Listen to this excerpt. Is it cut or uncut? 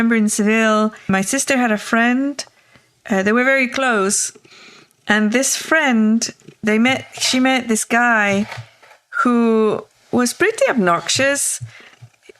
cut